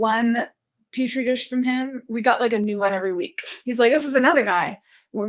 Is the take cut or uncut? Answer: uncut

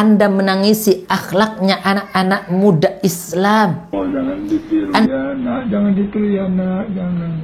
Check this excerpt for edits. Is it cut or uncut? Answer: cut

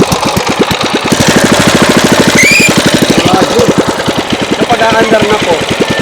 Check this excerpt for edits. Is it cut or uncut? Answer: cut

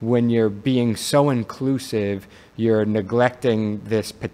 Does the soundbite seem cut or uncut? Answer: uncut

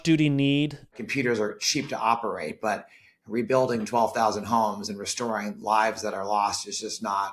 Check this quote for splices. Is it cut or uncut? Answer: cut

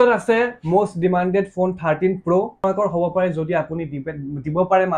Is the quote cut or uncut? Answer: cut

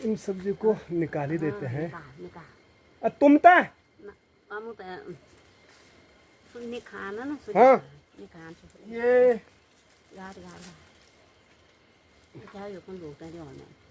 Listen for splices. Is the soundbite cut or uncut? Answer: uncut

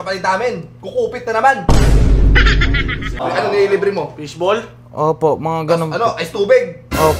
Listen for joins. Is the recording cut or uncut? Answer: cut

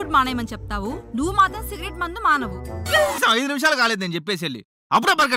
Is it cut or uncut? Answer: cut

